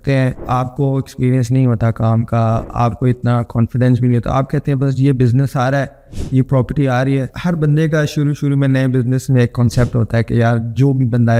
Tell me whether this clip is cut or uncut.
uncut